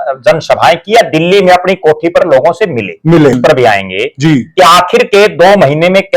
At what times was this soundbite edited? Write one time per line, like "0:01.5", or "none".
0:03.4